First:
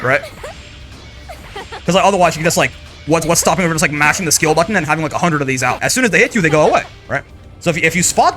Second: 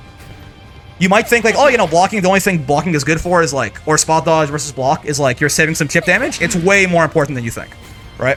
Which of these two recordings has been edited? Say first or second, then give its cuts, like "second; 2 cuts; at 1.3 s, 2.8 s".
first; 1 cut; at 5.8 s